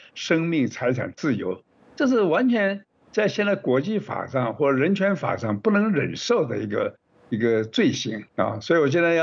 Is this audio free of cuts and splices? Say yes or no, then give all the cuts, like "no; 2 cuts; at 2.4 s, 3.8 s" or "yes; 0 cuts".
yes; 0 cuts